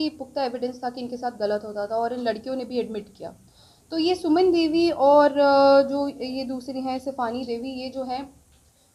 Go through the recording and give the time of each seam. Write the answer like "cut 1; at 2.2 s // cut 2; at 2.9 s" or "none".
none